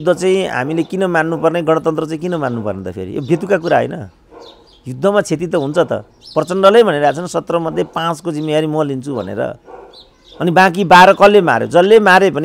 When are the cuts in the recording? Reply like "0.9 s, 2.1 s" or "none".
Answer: none